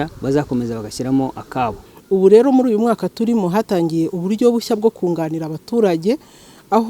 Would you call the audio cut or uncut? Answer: cut